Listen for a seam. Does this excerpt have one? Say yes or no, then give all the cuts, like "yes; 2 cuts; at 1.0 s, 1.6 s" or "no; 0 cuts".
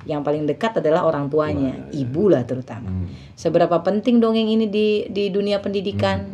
no; 0 cuts